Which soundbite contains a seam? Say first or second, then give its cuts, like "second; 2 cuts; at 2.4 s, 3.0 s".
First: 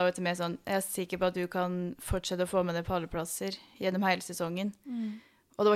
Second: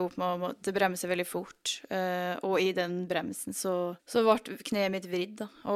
second; 1 cut; at 4.0 s